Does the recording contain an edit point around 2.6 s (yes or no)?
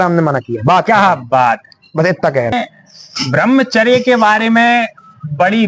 yes